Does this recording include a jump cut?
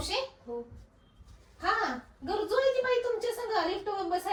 no; 0 cuts

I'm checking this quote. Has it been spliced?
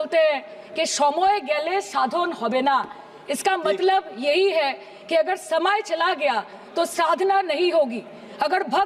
no; 0 cuts

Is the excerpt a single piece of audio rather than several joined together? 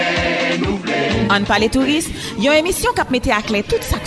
no; 1 cut; at 1.1 s

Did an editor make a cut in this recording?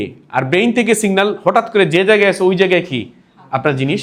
no; 0 cuts

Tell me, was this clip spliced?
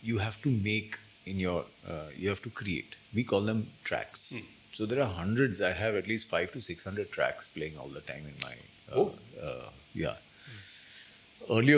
no; 0 cuts

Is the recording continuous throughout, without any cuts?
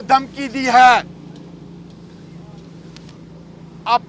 yes; 0 cuts

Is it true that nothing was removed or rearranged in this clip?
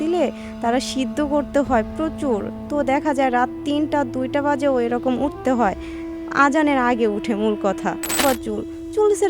no; 1 cut; at 8.2 s

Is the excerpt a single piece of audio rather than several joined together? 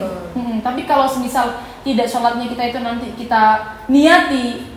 yes; 0 cuts

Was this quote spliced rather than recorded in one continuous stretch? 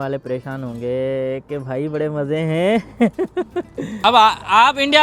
yes; 1 cut; at 3.9 s

